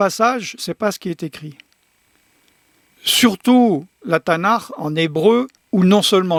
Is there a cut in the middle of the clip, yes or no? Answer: no